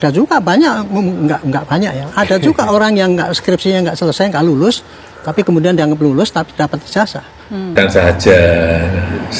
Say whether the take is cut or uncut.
cut